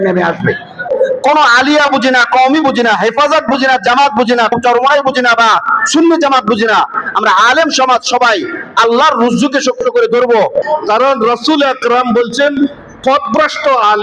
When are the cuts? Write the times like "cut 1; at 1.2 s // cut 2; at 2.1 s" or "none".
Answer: cut 1; at 0.9 s // cut 2; at 4.5 s // cut 3; at 10.6 s